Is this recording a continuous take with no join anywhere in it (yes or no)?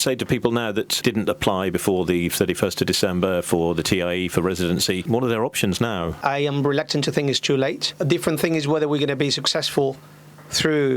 no